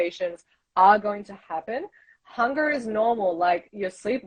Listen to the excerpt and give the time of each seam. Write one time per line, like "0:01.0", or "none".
none